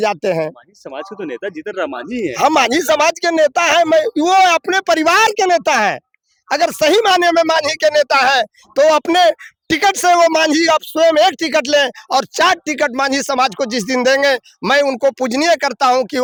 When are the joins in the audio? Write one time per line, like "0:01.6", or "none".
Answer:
none